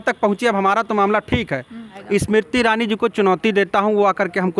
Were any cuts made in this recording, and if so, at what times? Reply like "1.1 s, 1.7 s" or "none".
1.9 s